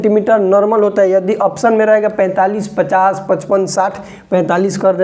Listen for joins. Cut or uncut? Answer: uncut